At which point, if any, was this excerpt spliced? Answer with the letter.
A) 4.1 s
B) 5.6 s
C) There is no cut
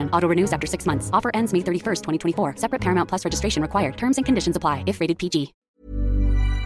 B